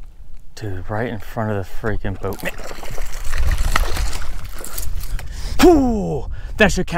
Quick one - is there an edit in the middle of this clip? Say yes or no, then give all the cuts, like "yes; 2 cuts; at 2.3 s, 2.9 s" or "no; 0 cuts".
no; 0 cuts